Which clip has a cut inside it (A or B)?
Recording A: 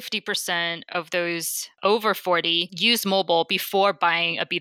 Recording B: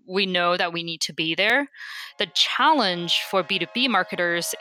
A